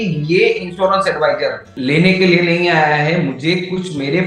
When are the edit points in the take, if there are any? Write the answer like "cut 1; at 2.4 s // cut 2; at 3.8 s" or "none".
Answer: cut 1; at 1.7 s